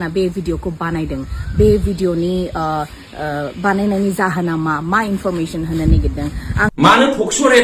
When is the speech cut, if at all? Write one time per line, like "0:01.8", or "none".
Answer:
0:06.7